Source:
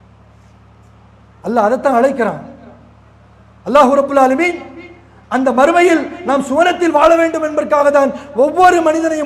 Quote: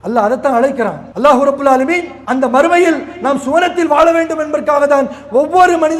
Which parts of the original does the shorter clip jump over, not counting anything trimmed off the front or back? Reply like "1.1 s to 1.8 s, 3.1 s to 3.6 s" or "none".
2.5 s to 3.6 s, 4.6 s to 5.2 s